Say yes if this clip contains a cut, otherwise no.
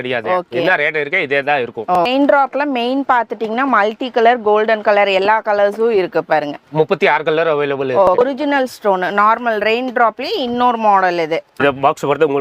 yes